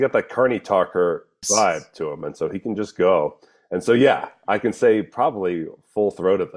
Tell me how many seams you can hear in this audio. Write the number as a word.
one